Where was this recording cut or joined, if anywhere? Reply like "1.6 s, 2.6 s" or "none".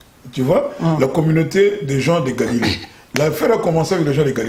none